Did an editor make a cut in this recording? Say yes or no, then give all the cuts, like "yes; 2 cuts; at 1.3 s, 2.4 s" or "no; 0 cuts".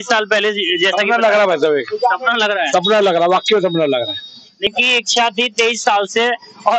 yes; 1 cut; at 4.7 s